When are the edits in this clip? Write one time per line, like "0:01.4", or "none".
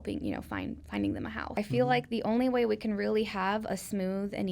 0:01.6